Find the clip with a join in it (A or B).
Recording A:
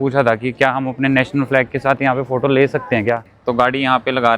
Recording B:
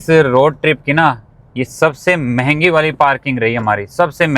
A